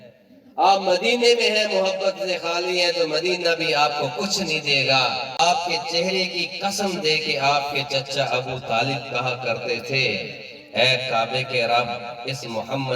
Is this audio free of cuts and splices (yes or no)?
no